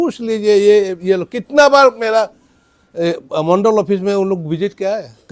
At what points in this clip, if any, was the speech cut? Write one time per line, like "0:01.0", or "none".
none